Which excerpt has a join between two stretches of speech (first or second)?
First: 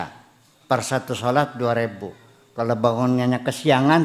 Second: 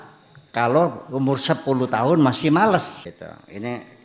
second